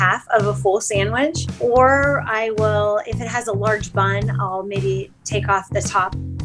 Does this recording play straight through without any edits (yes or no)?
no